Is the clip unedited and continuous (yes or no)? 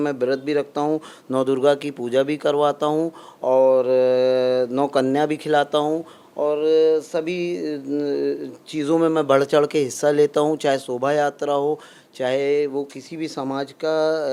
yes